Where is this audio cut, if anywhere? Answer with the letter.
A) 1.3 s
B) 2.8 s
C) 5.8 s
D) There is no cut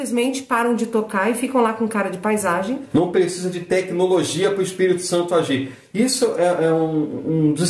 B